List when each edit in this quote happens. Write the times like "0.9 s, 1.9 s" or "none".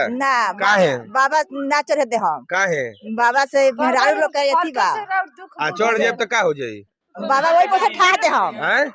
none